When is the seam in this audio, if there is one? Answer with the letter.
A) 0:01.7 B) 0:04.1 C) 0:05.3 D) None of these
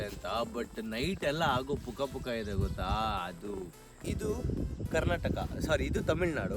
B